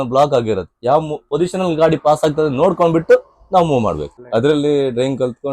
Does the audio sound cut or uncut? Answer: cut